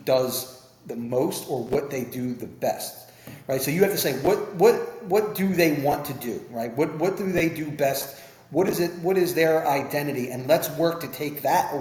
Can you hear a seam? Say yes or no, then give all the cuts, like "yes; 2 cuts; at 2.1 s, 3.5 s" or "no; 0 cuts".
no; 0 cuts